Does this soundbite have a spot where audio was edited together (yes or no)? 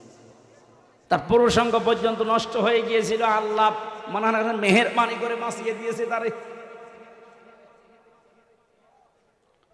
no